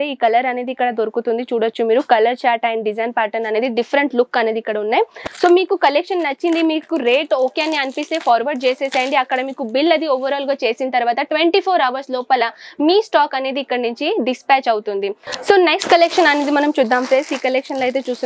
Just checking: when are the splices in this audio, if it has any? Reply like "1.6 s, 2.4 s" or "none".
5.2 s, 15.2 s